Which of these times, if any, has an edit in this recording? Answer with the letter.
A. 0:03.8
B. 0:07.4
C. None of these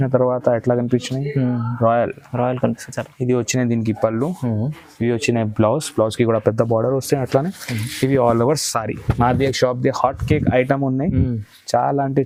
C